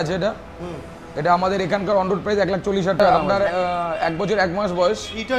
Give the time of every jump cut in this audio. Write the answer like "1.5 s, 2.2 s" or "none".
3.0 s